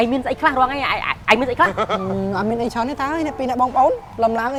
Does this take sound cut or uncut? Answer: uncut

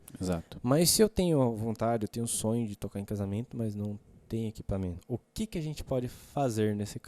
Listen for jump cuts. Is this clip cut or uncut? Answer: cut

